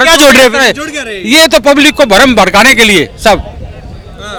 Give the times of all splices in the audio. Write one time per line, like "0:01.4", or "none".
none

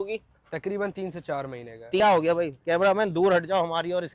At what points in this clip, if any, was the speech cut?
0:02.0

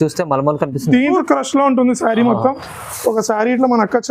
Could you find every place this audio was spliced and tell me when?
0:01.1

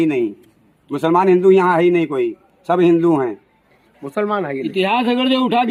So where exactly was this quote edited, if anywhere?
none

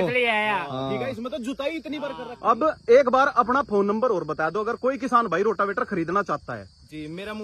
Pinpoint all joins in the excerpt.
0:02.2

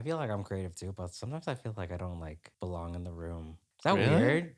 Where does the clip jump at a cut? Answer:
0:02.4
0:03.6

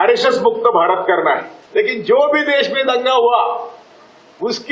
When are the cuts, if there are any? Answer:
0:01.6

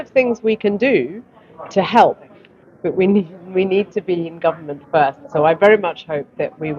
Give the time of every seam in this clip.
none

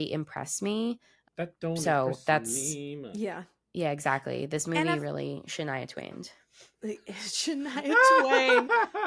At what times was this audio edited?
0:01.1

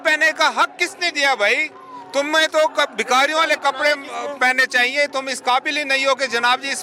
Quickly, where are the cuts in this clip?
none

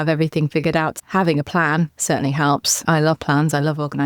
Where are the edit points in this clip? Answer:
0:01.0
0:02.8

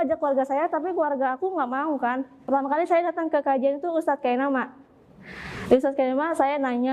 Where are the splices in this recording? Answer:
0:02.4

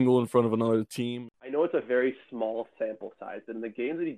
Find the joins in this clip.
0:01.1

